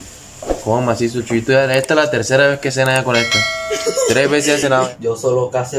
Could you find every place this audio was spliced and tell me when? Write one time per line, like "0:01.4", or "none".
0:04.6